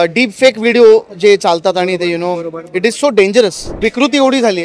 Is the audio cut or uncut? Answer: cut